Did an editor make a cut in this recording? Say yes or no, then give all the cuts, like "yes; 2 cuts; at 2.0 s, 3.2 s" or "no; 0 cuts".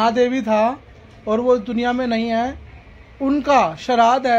no; 0 cuts